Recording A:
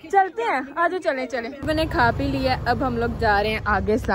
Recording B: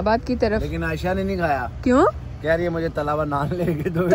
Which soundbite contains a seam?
A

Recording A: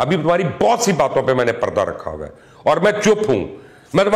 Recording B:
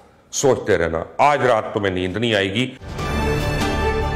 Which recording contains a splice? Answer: B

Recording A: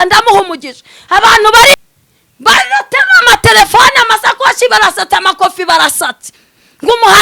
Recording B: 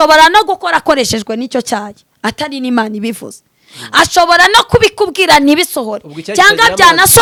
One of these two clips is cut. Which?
A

